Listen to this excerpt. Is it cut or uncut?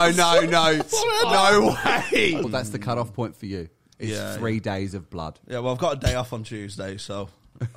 cut